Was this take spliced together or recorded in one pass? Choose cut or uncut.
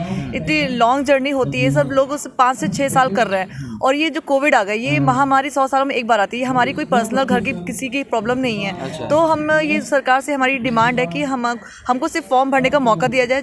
uncut